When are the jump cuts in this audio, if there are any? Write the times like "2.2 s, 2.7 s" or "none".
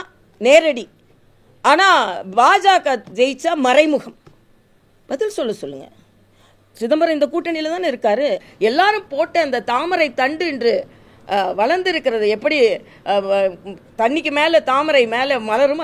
8.5 s